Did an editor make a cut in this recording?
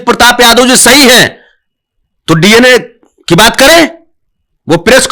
no; 0 cuts

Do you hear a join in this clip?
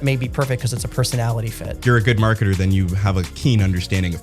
yes; 2 cuts; at 1.6 s, 3.3 s

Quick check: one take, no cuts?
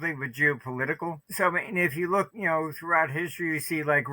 no; 2 cuts; at 1.2 s, 2.4 s

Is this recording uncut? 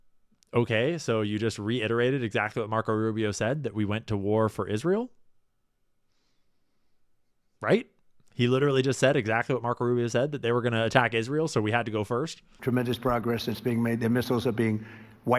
no; 1 cut; at 12.5 s

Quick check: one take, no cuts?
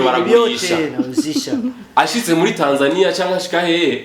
yes; 0 cuts

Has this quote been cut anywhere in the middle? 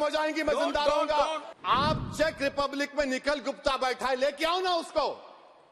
yes; 1 cut; at 1.5 s

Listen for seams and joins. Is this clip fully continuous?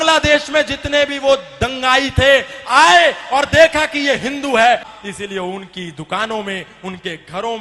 no; 1 cut; at 4.9 s

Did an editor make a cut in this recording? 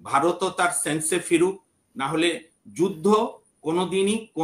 no; 0 cuts

